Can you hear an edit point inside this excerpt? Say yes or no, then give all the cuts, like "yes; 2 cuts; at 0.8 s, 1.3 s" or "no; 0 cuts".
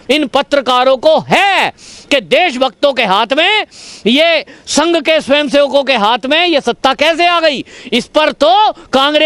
no; 0 cuts